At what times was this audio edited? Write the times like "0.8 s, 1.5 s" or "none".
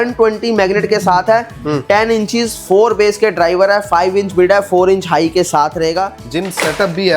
6.2 s